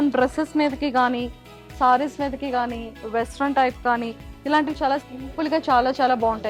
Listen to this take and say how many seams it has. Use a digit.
0